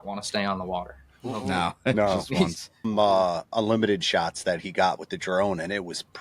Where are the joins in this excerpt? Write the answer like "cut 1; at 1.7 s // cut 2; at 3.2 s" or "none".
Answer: cut 1; at 2.9 s

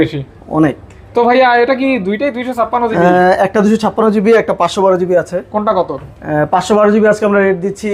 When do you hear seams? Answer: none

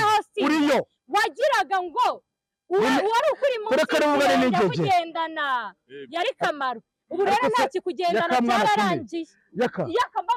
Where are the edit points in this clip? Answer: none

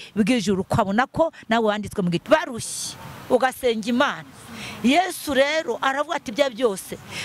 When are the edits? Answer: cut 1; at 2.2 s

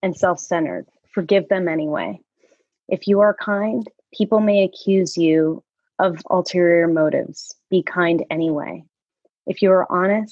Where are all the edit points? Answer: none

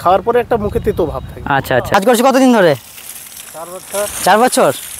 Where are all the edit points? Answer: cut 1; at 1.9 s

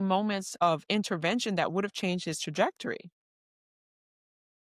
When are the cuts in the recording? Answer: none

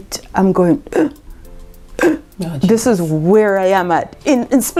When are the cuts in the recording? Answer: none

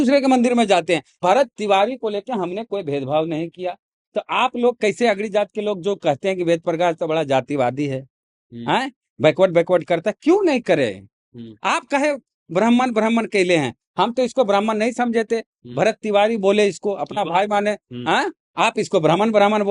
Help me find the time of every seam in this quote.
cut 1; at 1.2 s // cut 2; at 18.4 s

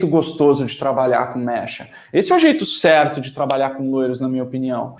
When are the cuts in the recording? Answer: none

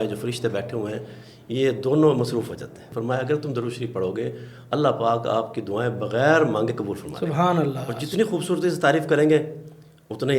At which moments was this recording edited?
cut 1; at 2.9 s // cut 2; at 7.9 s

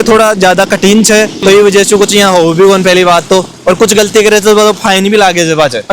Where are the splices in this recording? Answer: none

